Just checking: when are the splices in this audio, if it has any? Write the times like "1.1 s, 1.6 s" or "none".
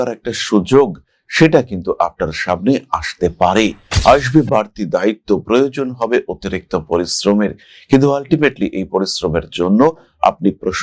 3.9 s